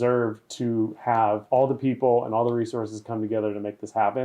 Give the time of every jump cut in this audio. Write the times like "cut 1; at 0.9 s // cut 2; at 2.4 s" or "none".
cut 1; at 1.4 s